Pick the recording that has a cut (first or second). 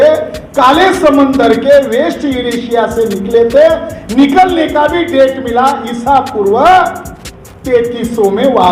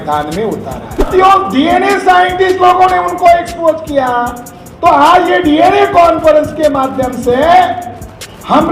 second